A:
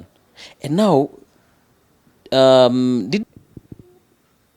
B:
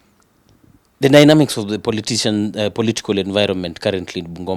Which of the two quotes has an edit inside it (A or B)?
A